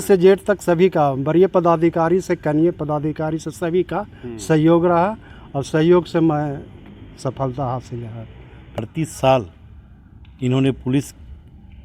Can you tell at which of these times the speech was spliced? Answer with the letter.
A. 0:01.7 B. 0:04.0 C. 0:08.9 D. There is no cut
C